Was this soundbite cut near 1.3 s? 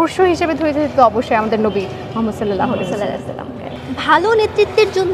no; 1 cut; at 3.7 s

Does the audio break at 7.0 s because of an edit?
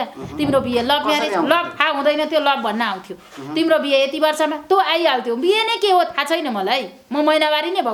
no; 0 cuts

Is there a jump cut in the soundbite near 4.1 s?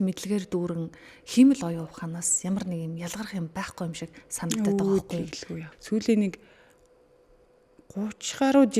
no; 1 cut; at 5.6 s

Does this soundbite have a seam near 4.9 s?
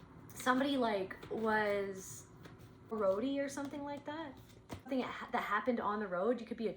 yes; 2 cuts; at 2.9 s, 4.9 s

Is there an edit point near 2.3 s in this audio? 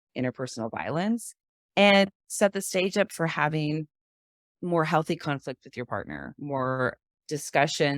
yes; 1 cut; at 2.3 s

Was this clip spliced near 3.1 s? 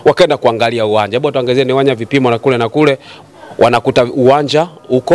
no; 0 cuts

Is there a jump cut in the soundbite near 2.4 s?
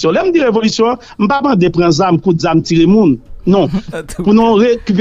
no; 1 cut; at 3.8 s

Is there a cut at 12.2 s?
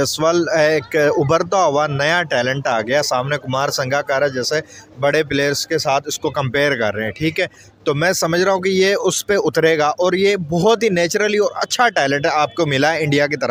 no; 0 cuts

